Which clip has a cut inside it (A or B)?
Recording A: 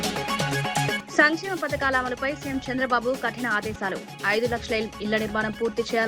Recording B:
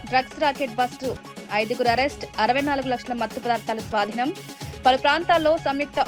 A